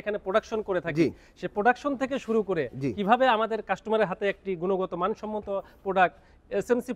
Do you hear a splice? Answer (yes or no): no